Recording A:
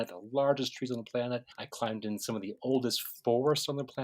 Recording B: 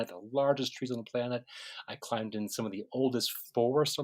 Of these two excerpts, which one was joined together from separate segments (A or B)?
A